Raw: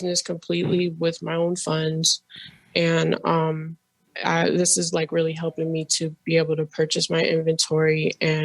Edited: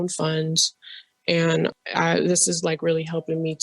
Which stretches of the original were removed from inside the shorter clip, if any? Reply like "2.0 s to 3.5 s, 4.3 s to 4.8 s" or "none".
3.2 s to 4.0 s